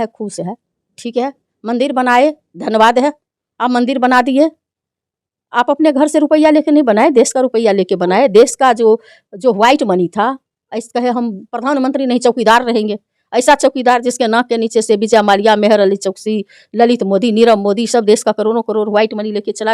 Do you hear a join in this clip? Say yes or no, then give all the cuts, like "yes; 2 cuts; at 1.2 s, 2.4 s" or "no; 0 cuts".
no; 0 cuts